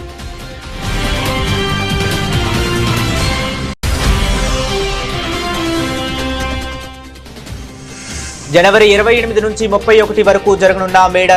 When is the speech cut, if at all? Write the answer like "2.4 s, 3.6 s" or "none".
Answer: none

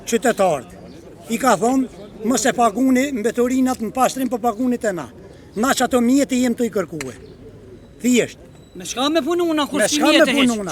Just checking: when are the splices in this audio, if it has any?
none

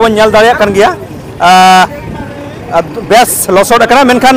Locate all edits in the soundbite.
none

